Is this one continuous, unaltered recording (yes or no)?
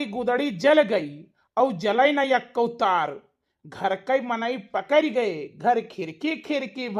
yes